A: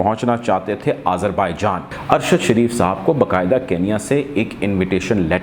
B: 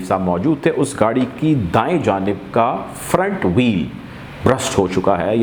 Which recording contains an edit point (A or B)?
A